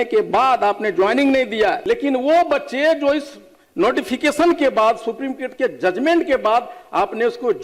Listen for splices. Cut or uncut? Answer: cut